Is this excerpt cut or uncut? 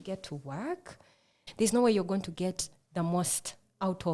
cut